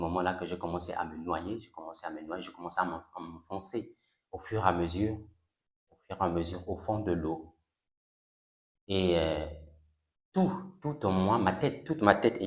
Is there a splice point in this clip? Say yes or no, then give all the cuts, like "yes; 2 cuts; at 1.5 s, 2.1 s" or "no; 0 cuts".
no; 0 cuts